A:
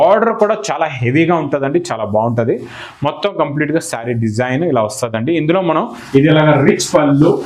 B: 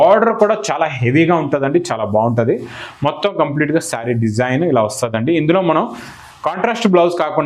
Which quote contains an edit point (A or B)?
A